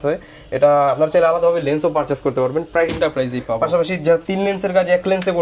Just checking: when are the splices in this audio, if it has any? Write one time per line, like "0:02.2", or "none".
0:02.9